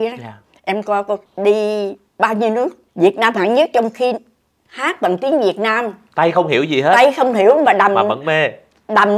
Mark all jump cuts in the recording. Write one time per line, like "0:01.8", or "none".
0:01.3
0:02.8
0:06.0

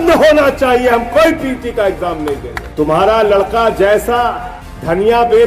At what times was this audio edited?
0:02.6

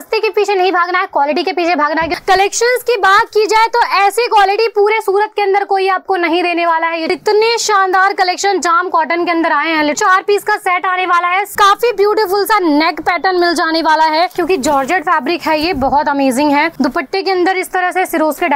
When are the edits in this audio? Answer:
0:02.1
0:07.1
0:10.0
0:11.5
0:14.3
0:16.7

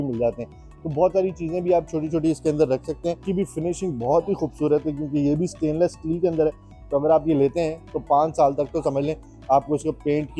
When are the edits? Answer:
0:03.2

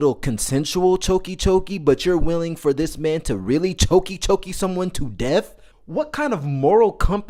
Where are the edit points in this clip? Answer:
none

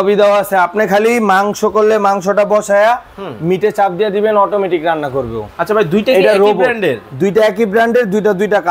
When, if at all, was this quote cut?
none

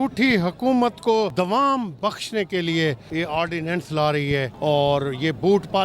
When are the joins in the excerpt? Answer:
0:01.3
0:03.1
0:04.5

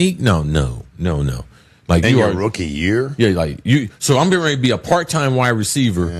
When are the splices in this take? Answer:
0:02.4

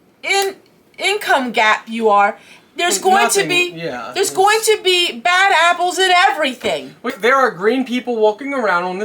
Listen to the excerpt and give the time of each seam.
0:07.1

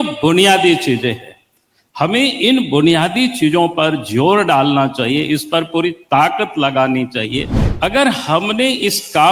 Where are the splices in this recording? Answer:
0:07.6

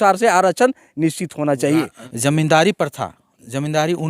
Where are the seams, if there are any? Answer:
0:02.0

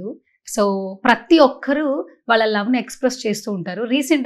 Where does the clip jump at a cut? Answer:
none

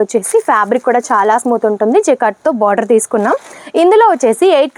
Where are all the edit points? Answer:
none

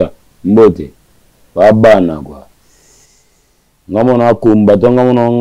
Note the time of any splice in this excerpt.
none

